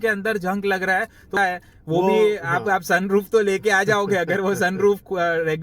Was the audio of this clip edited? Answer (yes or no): yes